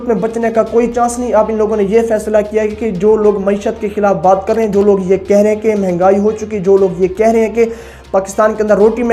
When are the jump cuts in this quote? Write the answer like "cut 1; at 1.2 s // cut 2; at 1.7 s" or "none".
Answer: none